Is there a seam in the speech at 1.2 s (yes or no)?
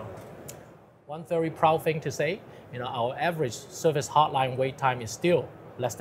yes